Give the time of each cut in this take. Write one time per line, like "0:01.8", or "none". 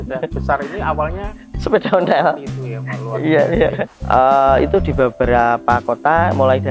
0:03.9